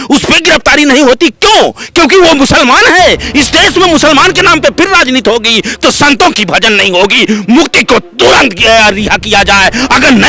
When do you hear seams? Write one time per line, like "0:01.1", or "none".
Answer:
none